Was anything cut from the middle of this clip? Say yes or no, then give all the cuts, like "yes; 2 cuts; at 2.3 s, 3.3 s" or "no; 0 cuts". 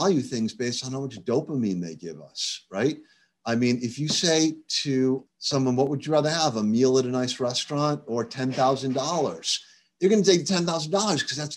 yes; 1 cut; at 5.2 s